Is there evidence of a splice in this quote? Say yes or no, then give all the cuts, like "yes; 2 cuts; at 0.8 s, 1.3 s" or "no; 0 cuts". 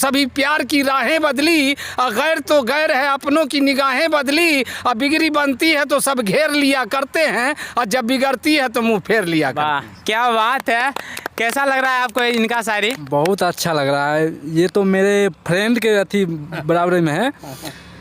no; 0 cuts